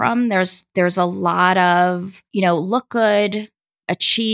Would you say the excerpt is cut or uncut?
cut